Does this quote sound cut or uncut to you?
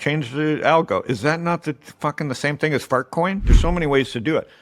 cut